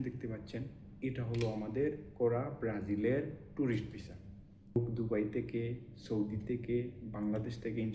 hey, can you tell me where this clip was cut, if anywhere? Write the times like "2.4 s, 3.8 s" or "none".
4.8 s